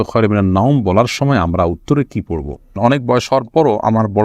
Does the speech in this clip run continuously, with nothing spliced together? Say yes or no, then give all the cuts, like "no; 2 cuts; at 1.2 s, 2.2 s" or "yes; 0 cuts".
no; 1 cut; at 2.8 s